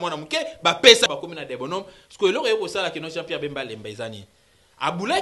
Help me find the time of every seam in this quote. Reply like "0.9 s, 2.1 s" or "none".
1.1 s